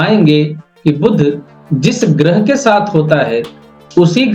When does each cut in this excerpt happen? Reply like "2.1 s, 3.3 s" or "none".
none